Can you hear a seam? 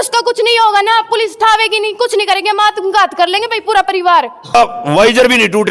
yes; 1 cut; at 4.5 s

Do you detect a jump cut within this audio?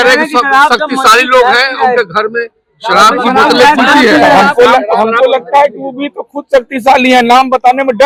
no; 0 cuts

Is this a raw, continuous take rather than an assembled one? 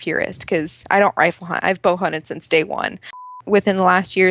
no; 1 cut; at 3.3 s

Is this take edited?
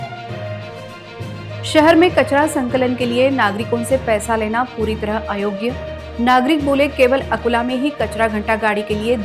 no; 0 cuts

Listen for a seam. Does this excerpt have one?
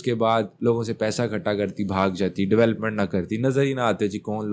no; 0 cuts

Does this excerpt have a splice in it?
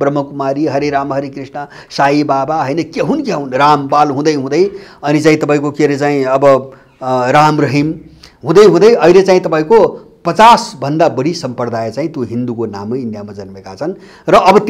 no; 0 cuts

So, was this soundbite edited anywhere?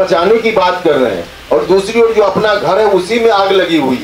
no; 0 cuts

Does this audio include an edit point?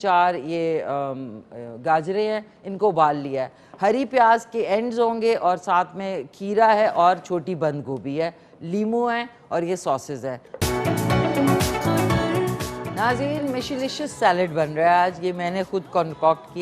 yes; 1 cut; at 10.5 s

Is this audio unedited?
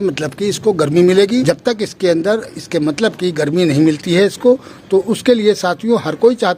no; 1 cut; at 1.5 s

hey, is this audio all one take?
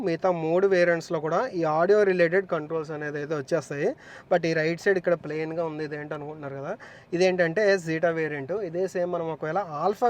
yes; 0 cuts

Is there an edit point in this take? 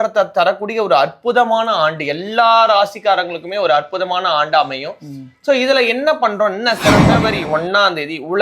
yes; 1 cut; at 7.1 s

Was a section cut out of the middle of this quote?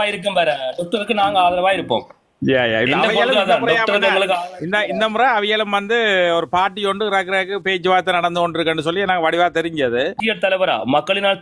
yes; 1 cut; at 10.2 s

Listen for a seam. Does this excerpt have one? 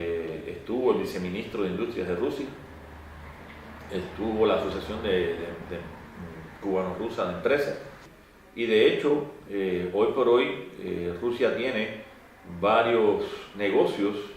yes; 1 cut; at 4.6 s

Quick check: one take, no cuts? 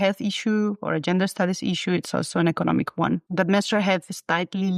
no; 1 cut; at 3.3 s

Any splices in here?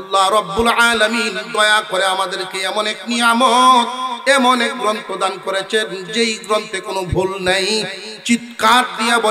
no; 0 cuts

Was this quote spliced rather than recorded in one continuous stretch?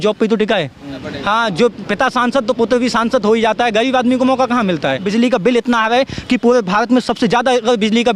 yes; 2 cuts; at 1.0 s, 5.1 s

